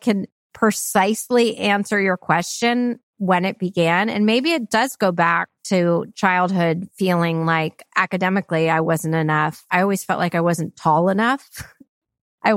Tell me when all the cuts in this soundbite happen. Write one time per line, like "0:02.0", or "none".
0:07.8
0:09.7